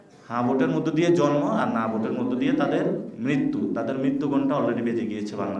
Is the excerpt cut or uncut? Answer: uncut